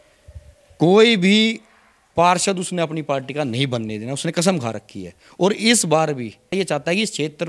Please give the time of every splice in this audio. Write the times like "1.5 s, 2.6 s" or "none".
6.5 s